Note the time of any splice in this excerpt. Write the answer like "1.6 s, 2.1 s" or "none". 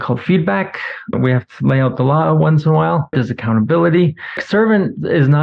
1.1 s, 3.1 s, 4.4 s